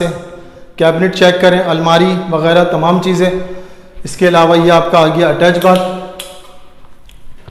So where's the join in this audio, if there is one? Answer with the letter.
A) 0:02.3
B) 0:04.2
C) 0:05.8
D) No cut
D